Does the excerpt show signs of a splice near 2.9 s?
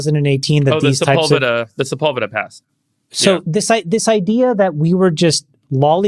yes; 1 cut; at 2.9 s

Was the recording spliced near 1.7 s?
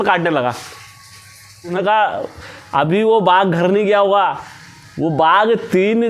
yes; 1 cut; at 1.7 s

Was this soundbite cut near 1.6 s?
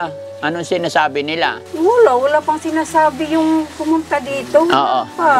yes; 1 cut; at 1.6 s

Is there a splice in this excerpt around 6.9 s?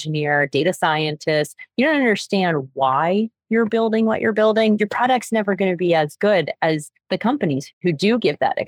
yes; 2 cuts; at 6.9 s, 7.7 s

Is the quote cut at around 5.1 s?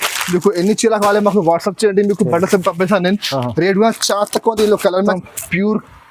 yes; 1 cut; at 5.1 s

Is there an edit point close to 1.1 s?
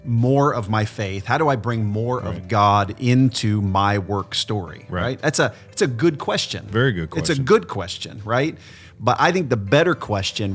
no; 0 cuts

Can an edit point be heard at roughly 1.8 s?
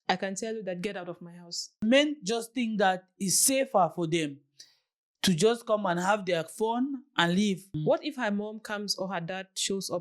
yes; 2 cuts; at 1.8 s, 7.7 s

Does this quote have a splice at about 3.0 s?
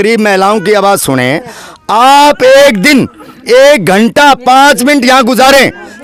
no; 0 cuts

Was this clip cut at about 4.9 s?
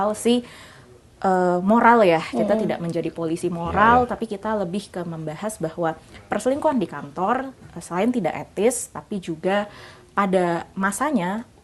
no; 0 cuts

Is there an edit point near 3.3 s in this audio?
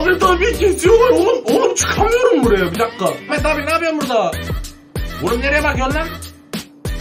yes; 1 cut; at 3.3 s

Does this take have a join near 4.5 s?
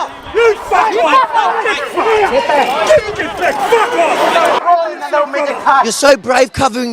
no; 1 cut; at 5.9 s

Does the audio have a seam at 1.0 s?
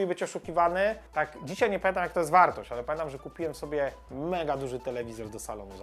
yes; 1 cut; at 1.0 s

